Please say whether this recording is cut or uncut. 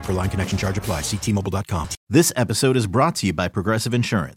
cut